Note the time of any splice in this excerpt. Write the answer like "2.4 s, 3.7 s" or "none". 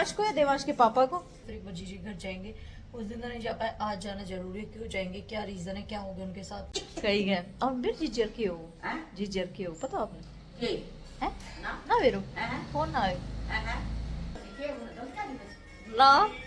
1.4 s, 6.7 s, 14.5 s

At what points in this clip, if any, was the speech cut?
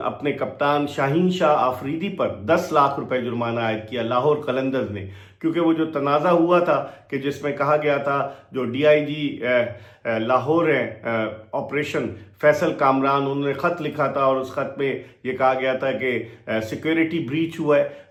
none

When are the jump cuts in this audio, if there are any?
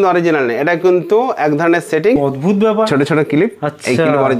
2.2 s

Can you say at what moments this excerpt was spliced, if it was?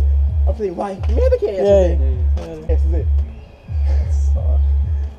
2.7 s

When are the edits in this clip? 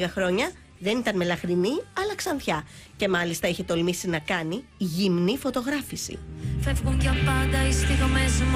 2.8 s

